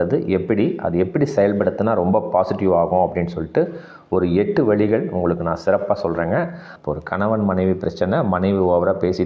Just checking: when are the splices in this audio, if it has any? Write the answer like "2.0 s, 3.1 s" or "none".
6.7 s